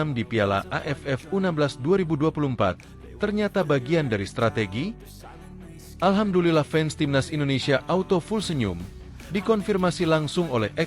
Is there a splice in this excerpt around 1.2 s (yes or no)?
no